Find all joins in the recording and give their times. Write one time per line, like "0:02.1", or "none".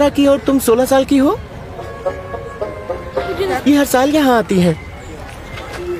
none